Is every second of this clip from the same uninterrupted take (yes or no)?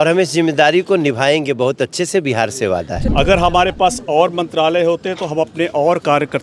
no